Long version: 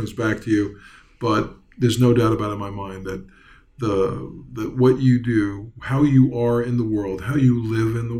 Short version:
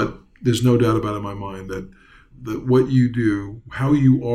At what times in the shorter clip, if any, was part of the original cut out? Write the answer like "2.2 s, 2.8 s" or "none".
2.2 s